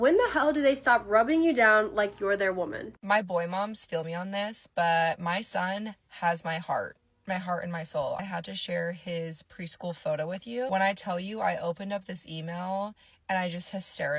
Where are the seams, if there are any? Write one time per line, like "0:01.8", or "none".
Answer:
0:02.8
0:08.2
0:10.7